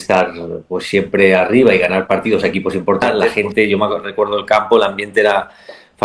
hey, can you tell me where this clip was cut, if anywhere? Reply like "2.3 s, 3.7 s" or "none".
3.2 s